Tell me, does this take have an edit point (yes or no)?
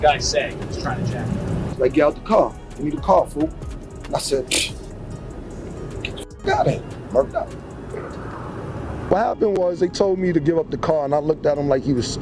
no